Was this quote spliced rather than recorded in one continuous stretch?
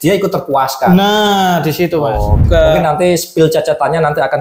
yes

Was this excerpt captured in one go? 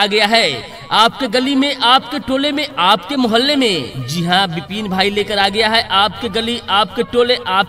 yes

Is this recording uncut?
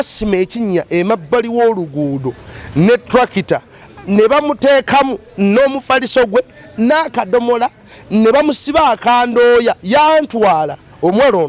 yes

